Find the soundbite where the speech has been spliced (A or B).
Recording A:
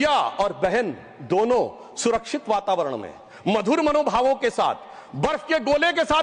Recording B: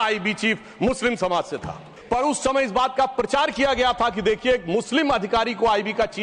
B